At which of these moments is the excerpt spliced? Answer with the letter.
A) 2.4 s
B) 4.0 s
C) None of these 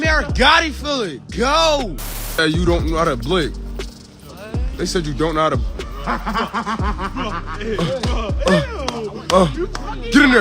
A